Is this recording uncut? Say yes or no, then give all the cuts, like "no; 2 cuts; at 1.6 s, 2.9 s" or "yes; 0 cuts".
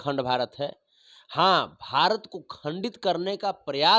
yes; 0 cuts